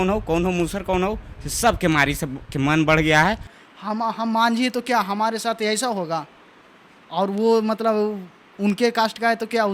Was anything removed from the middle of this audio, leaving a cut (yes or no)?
yes